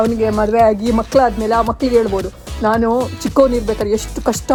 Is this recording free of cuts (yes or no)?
yes